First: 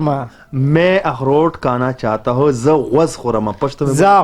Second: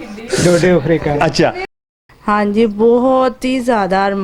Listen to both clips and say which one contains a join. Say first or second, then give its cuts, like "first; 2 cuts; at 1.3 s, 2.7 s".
second; 1 cut; at 1.6 s